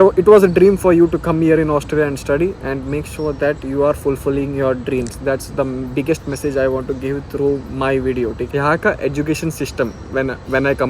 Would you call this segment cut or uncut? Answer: cut